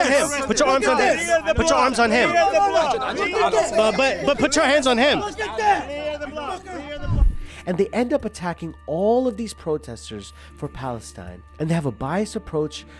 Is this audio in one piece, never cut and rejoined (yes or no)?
yes